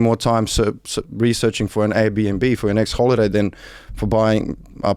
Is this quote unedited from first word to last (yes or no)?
yes